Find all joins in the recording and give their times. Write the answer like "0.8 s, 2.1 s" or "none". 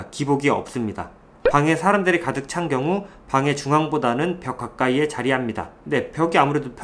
1.3 s